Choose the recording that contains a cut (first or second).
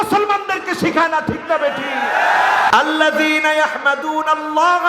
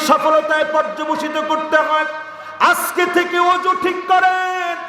first